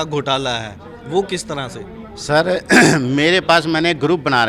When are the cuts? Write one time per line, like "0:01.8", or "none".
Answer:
none